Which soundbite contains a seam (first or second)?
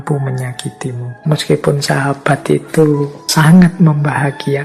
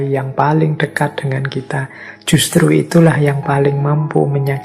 first